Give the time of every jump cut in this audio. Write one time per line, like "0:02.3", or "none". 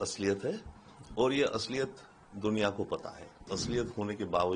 0:03.5